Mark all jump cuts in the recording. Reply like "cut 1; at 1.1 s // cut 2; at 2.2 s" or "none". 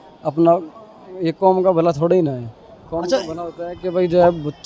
none

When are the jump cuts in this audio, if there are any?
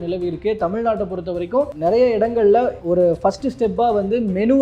cut 1; at 1.7 s // cut 2; at 2.8 s

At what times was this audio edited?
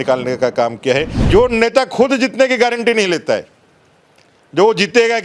cut 1; at 1.2 s

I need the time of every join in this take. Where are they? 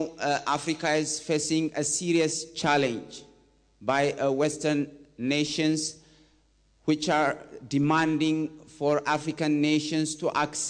none

